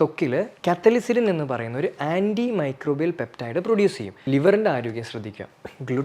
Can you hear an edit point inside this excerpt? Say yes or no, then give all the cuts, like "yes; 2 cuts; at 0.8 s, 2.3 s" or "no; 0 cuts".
yes; 1 cut; at 4.1 s